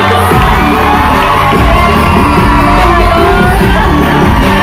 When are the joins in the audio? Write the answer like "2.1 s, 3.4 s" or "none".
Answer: none